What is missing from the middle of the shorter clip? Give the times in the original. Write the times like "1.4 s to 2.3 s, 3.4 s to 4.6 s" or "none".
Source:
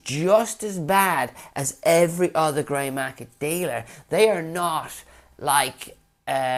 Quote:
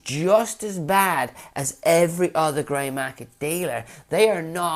none